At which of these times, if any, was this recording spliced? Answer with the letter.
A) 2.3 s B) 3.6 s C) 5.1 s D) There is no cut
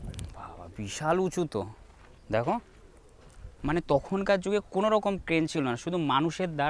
B